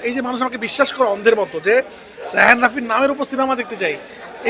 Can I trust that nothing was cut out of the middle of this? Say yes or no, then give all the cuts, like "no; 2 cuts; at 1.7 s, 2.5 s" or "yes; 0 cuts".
yes; 0 cuts